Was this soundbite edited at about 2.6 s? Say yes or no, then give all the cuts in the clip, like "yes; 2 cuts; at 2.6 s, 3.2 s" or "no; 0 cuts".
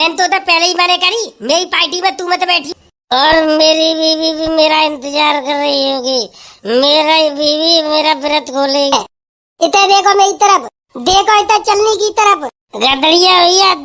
yes; 2 cuts; at 2.6 s, 8.9 s